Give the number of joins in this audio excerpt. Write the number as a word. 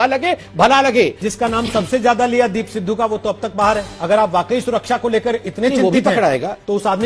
two